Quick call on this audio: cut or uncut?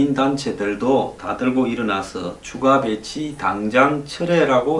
cut